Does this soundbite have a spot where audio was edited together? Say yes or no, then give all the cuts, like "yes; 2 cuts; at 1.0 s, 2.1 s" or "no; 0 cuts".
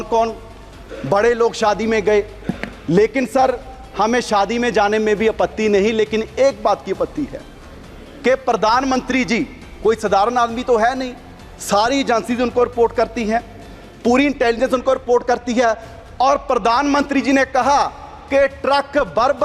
no; 0 cuts